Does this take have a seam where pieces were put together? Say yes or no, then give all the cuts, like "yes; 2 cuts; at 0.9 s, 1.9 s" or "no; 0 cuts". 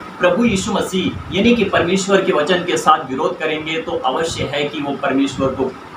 no; 0 cuts